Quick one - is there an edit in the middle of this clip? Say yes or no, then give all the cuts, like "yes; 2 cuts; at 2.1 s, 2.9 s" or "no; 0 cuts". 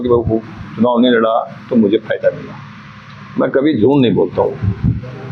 no; 0 cuts